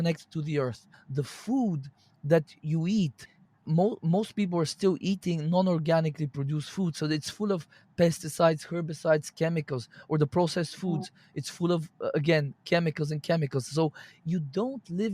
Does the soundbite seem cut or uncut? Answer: cut